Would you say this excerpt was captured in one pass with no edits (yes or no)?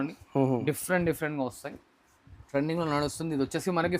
no